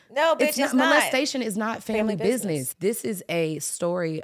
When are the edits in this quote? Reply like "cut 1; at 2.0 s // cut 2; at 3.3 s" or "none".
cut 1; at 2.7 s